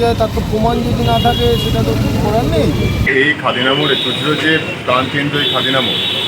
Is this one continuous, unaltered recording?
no; 1 cut; at 3.1 s

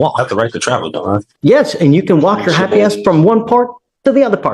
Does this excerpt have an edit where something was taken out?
yes; 1 cut; at 1.3 s

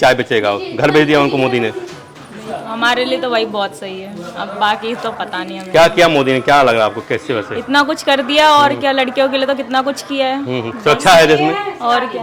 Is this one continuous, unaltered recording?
yes; 0 cuts

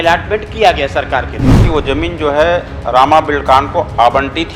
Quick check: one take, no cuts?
no; 1 cut; at 1.6 s

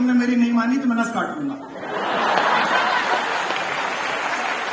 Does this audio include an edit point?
no; 0 cuts

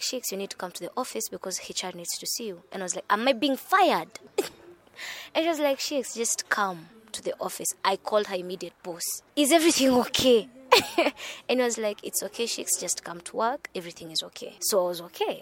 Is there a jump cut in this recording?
no; 0 cuts

